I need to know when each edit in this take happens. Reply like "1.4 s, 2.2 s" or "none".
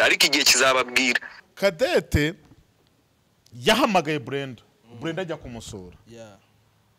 1.4 s